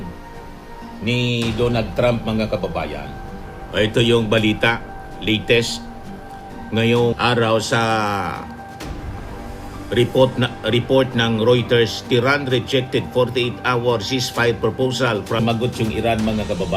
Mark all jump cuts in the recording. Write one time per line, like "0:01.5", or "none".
0:15.4